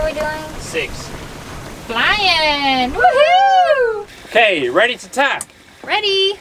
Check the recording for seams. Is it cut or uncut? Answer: uncut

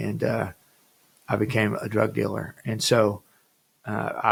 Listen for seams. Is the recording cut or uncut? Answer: uncut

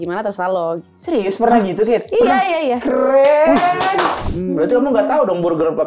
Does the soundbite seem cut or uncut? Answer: cut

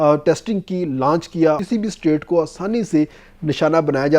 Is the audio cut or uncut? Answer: cut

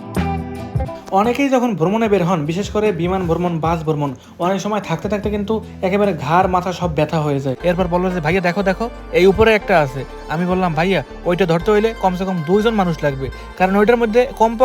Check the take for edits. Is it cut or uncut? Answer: cut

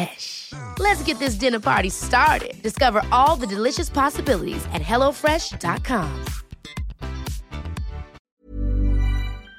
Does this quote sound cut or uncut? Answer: cut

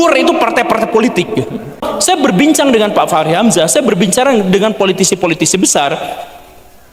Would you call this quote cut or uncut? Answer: cut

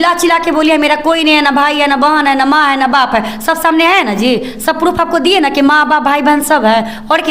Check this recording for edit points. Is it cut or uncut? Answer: uncut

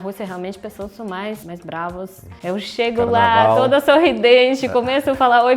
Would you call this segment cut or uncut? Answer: cut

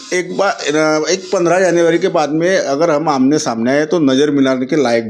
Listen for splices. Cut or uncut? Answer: uncut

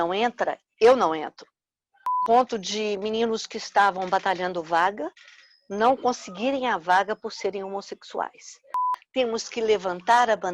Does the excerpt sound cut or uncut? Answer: cut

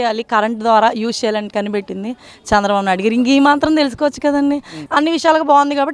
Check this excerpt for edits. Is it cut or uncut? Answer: cut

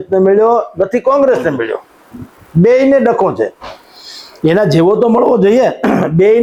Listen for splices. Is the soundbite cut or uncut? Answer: uncut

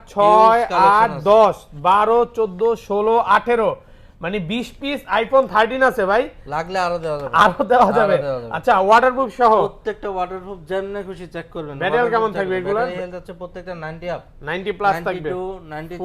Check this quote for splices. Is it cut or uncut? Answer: uncut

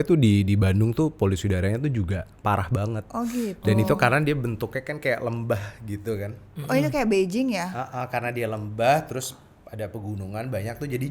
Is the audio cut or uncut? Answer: uncut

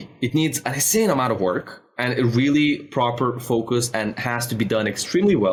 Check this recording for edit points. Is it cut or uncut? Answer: uncut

